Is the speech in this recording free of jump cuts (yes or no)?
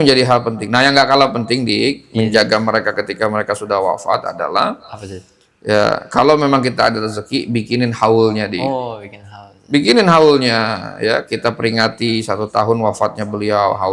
yes